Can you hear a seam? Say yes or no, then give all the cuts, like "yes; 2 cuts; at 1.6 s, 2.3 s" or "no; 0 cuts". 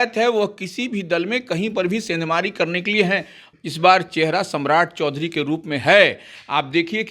yes; 1 cut; at 3.4 s